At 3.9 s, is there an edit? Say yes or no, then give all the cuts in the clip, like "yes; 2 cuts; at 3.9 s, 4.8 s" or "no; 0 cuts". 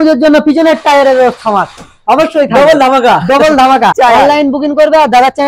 yes; 1 cut; at 3.9 s